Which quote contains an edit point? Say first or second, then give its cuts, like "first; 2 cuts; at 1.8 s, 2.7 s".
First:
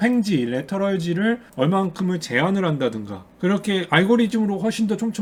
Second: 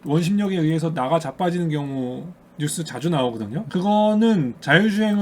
second; 1 cut; at 3.7 s